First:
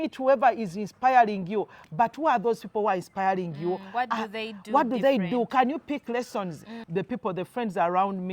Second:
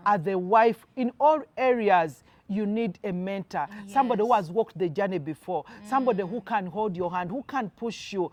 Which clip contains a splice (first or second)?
first